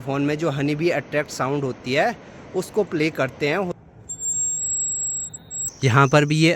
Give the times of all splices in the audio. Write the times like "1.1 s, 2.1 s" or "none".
3.8 s, 5.6 s